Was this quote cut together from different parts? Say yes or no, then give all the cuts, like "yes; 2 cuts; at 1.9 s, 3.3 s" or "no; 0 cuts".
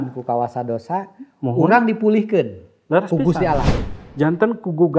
yes; 1 cut; at 3.7 s